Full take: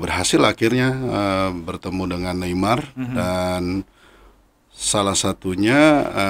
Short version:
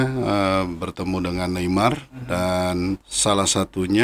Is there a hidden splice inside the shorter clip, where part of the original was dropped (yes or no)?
yes